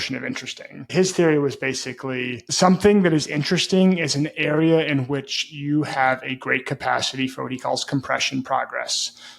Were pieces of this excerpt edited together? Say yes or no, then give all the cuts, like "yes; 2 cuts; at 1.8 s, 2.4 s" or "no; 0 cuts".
yes; 1 cut; at 0.9 s